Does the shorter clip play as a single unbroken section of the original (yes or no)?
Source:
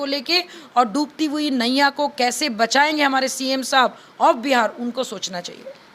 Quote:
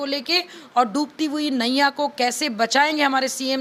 yes